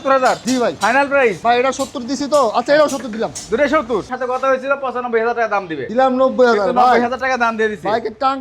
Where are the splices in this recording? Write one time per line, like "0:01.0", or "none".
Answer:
0:04.1
0:05.8